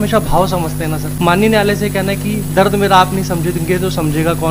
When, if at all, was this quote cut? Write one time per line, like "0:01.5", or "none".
0:01.1